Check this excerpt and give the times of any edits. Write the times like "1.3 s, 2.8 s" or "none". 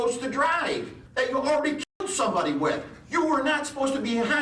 1.0 s